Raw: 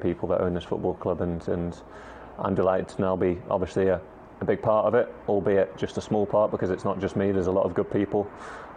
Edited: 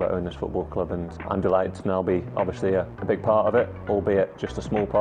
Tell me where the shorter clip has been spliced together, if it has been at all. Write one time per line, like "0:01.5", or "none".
0:01.1
0:02.9